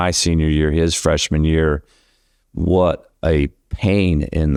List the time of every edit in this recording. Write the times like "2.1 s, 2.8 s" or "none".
none